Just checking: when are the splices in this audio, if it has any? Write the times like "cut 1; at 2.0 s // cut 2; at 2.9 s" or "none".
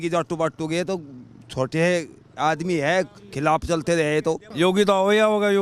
cut 1; at 4.5 s